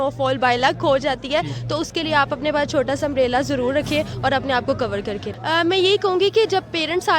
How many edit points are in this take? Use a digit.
1